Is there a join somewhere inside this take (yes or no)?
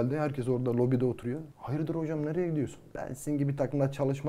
yes